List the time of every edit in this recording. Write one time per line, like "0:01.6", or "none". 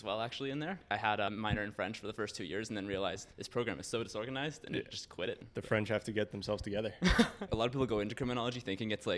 0:00.9
0:03.3
0:05.5
0:07.5